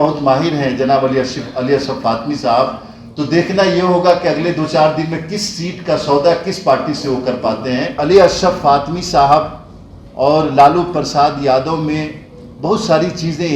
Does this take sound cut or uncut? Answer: cut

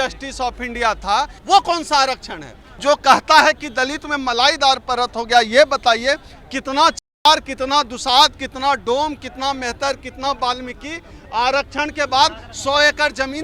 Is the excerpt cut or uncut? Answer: cut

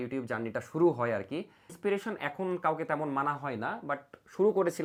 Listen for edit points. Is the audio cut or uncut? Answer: uncut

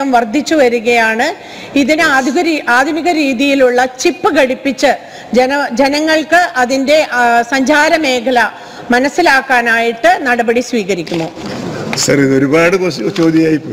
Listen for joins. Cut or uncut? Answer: cut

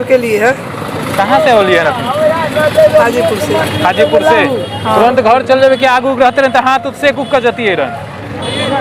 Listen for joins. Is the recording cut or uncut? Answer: uncut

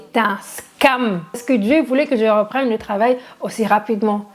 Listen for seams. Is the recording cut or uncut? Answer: cut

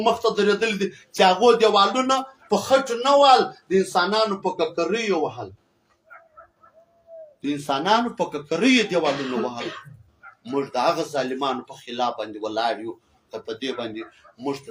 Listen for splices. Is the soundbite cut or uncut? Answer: uncut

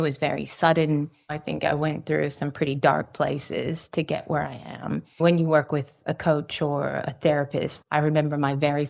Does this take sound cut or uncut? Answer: cut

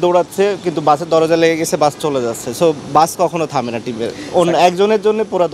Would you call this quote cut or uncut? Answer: uncut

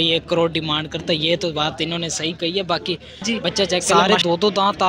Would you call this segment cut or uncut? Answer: cut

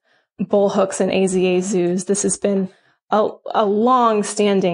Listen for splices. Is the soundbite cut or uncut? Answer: uncut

